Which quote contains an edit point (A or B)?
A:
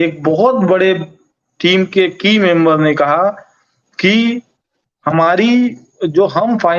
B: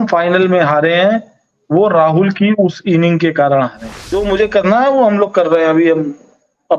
B